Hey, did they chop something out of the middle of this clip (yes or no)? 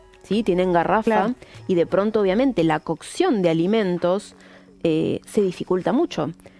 no